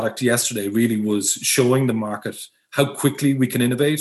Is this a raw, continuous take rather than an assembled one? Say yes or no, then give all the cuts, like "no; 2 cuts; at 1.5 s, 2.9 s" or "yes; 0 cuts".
yes; 0 cuts